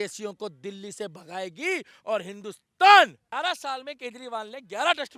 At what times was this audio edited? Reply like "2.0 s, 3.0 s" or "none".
3.2 s